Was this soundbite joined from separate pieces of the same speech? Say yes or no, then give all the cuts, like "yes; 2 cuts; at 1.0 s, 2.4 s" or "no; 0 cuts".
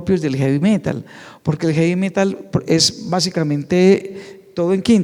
no; 0 cuts